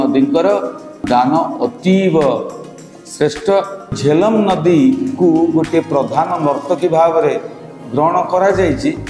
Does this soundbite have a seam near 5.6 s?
no; 2 cuts; at 1.0 s, 3.9 s

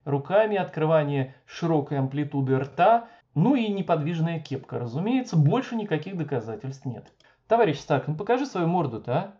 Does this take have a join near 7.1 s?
yes; 1 cut; at 7.1 s

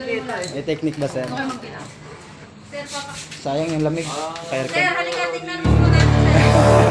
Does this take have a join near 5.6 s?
yes; 1 cut; at 5.6 s

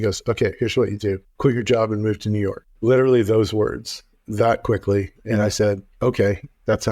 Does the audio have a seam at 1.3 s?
yes; 2 cuts; at 1.3 s, 2.7 s

